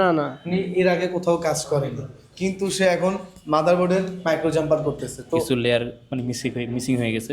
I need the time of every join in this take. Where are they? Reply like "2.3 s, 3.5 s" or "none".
5.5 s